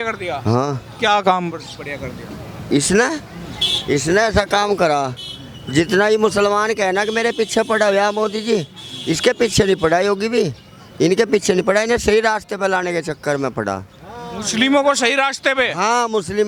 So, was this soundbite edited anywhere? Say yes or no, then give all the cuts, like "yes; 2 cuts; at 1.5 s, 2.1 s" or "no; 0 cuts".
no; 0 cuts